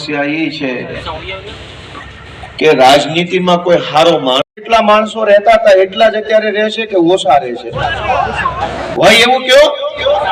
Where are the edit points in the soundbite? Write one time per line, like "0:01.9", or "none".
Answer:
0:04.6